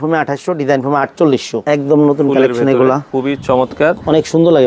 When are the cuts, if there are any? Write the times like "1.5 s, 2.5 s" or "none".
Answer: 1.5 s, 3.1 s